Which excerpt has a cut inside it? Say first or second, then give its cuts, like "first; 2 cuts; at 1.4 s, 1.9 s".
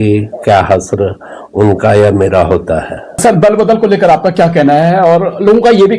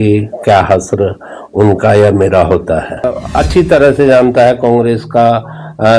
second; 1 cut; at 3.1 s